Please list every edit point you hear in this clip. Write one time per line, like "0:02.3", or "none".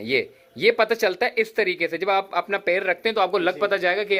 none